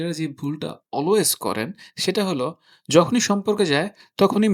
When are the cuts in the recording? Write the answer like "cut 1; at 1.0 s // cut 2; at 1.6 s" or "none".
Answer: none